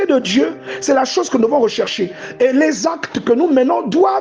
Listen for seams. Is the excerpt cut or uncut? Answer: uncut